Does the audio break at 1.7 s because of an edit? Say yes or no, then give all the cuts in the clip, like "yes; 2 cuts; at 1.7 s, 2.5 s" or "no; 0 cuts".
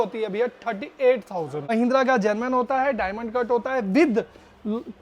yes; 1 cut; at 1.7 s